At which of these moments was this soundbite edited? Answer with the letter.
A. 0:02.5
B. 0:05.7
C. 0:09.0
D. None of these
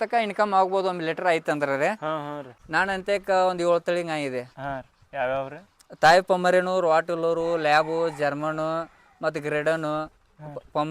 A